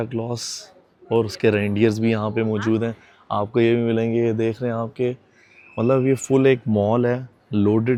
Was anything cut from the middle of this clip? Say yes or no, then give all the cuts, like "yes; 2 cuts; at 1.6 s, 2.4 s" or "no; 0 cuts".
no; 0 cuts